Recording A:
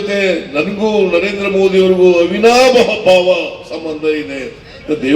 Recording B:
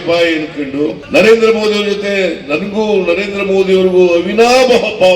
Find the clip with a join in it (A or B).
B